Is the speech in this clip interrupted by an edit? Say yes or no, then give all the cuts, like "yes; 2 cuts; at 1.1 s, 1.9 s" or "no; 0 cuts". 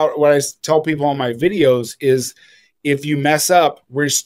no; 0 cuts